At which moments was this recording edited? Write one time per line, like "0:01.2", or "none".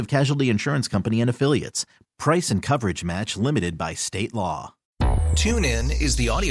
0:04.8